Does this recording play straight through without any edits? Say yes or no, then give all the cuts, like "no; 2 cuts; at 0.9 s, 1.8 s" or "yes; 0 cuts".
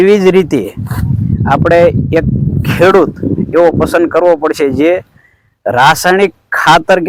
yes; 0 cuts